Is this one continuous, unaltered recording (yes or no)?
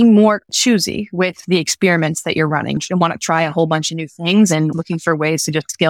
no